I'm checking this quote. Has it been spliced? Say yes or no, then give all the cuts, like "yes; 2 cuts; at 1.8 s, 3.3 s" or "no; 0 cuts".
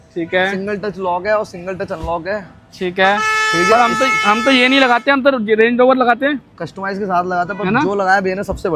no; 0 cuts